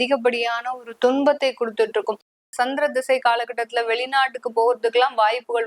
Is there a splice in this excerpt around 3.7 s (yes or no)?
no